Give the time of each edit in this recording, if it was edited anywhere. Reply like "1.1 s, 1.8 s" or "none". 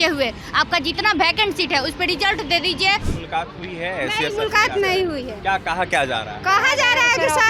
3.1 s